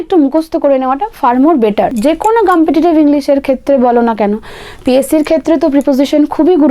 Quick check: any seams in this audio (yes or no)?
yes